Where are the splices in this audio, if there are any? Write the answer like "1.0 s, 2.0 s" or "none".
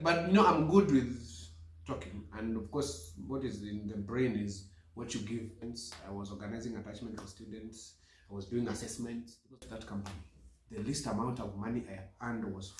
5.6 s, 9.6 s

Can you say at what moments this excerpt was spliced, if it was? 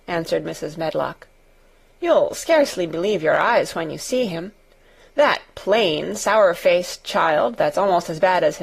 2.7 s

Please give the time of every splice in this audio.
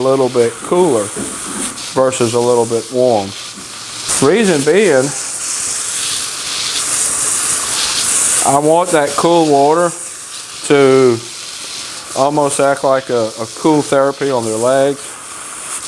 4.0 s

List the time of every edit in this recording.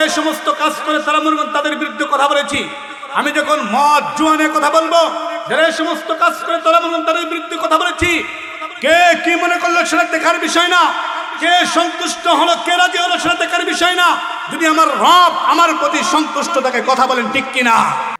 none

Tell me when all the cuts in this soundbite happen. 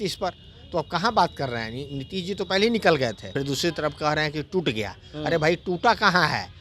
3.3 s

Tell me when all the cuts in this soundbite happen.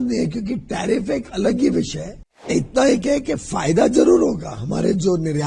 2.5 s

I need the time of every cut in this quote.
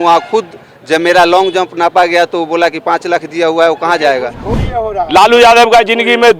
4.5 s

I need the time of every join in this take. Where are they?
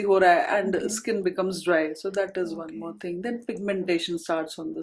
none

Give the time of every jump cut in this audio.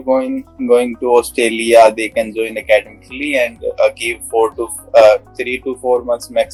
none

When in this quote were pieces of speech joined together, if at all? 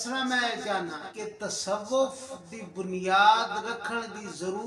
1.1 s

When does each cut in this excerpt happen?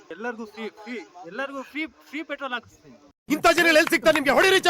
1.1 s

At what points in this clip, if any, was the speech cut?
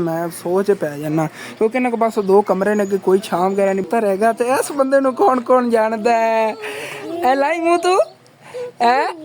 3.9 s

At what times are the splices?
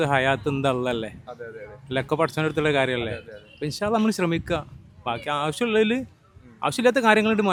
none

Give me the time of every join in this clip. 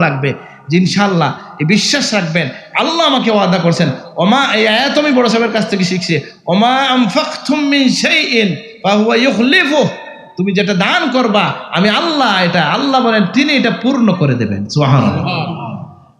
none

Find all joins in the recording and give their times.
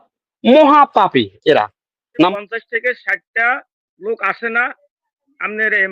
2.3 s

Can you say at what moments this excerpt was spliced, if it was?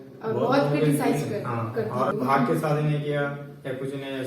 2.1 s

